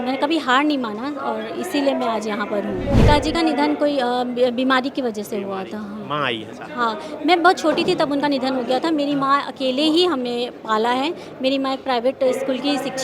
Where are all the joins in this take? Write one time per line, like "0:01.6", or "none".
0:02.9